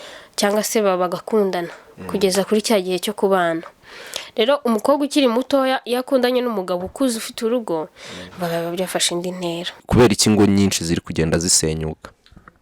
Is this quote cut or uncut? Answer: cut